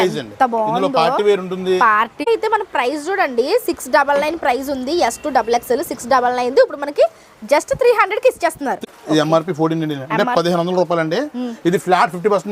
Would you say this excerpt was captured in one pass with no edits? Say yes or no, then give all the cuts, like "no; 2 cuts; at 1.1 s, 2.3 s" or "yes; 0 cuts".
no; 2 cuts; at 2.3 s, 8.8 s